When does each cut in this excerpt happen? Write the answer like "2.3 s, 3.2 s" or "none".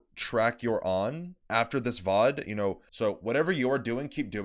2.9 s